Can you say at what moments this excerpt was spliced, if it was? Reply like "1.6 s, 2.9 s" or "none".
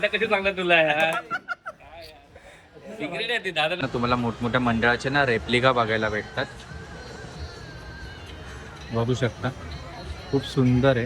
3.8 s